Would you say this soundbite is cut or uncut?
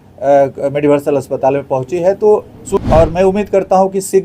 cut